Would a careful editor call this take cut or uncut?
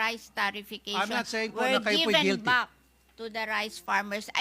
uncut